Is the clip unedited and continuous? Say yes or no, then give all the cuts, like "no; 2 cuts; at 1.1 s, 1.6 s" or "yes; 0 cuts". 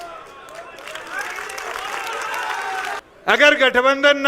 no; 1 cut; at 3.0 s